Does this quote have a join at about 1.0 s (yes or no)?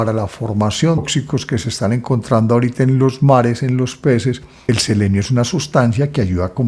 yes